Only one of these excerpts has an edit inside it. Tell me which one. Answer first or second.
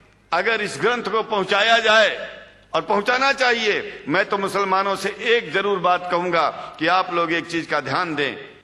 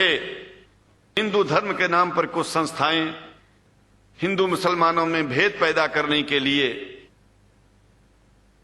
second